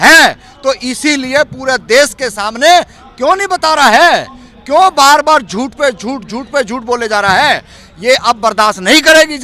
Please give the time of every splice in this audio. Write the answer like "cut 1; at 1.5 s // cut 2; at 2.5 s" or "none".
none

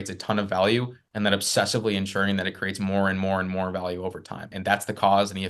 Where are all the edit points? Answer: cut 1; at 4.5 s

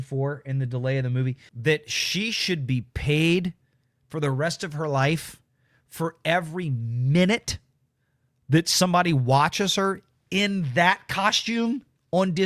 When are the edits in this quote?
cut 1; at 1.4 s

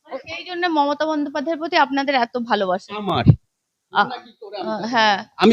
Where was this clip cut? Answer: none

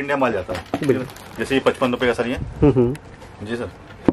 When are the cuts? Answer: none

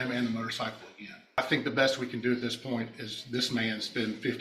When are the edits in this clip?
cut 1; at 1.4 s

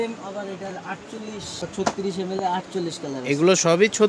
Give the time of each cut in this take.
cut 1; at 1.6 s

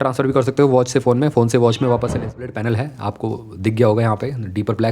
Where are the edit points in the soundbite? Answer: cut 1; at 2.5 s

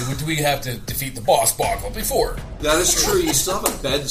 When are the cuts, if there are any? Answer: cut 1; at 2.6 s

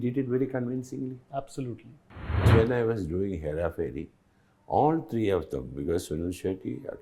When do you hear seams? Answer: cut 1; at 2.4 s

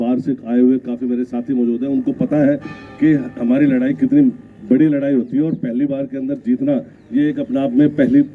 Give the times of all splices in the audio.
none

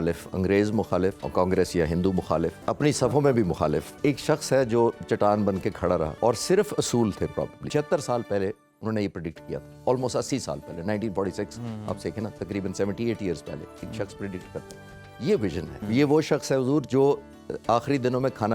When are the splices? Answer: cut 1; at 1.2 s // cut 2; at 2.6 s // cut 3; at 4.0 s // cut 4; at 6.1 s // cut 5; at 7.6 s // cut 6; at 15.8 s

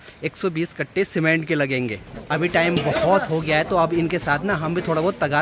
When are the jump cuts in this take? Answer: cut 1; at 2.1 s

